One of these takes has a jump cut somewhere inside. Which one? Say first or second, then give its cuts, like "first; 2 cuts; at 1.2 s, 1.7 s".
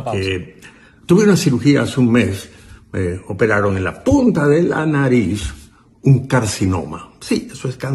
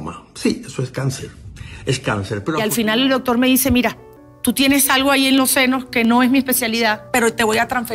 second; 1 cut; at 2.6 s